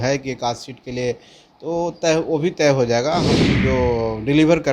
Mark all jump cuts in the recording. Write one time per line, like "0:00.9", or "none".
0:03.3